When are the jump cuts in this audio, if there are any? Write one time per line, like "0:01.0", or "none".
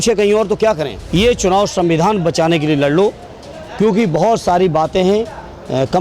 0:01.0